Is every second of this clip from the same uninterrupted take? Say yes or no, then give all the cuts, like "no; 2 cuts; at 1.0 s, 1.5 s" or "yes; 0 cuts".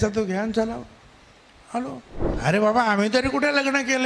no; 1 cut; at 2.2 s